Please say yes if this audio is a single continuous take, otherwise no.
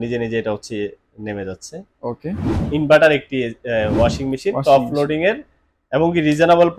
no